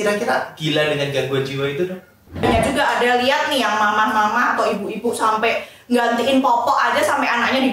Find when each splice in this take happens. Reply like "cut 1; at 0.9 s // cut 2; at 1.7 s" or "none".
cut 1; at 2.4 s